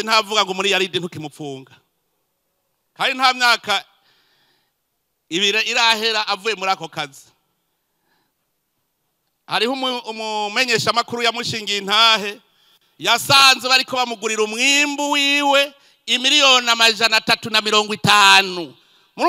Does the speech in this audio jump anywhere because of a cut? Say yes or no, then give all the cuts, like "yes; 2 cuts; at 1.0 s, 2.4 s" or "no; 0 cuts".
no; 0 cuts